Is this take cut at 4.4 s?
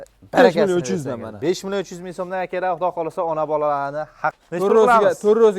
yes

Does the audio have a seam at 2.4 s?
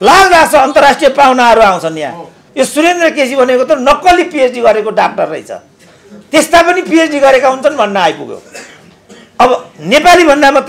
yes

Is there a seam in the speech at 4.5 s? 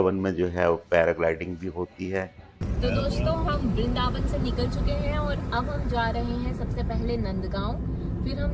no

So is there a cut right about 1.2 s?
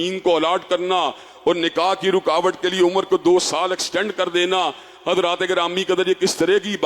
no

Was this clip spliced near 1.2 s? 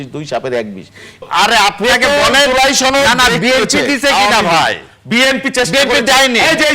yes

